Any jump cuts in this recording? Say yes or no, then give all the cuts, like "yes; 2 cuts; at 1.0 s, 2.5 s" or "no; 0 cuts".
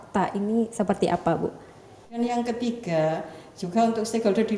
yes; 1 cut; at 2.2 s